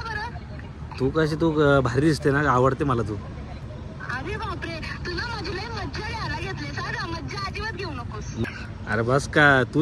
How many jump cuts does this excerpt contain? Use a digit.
1